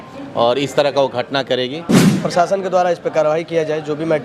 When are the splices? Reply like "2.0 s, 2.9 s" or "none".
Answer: 2.1 s